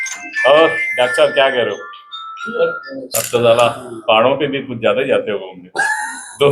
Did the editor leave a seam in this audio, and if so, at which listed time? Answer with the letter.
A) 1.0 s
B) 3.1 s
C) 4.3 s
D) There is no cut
B